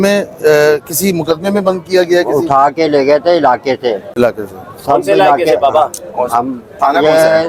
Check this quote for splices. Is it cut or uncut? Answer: uncut